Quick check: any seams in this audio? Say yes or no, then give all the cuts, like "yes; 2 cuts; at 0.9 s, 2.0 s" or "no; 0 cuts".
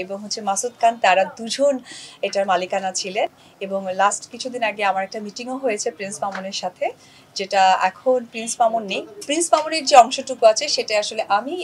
no; 0 cuts